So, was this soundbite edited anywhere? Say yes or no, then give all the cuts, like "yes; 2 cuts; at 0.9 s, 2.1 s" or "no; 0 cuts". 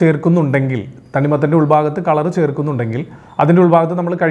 no; 0 cuts